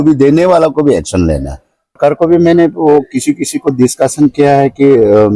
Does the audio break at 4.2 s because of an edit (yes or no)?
no